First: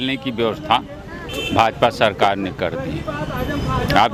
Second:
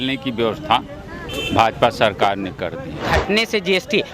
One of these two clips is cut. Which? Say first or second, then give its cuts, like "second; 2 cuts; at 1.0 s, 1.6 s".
second; 1 cut; at 3.0 s